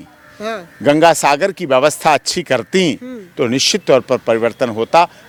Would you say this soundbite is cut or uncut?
uncut